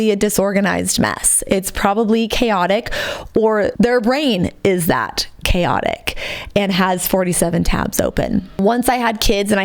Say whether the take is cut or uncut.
cut